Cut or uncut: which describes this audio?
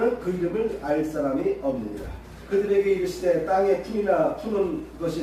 cut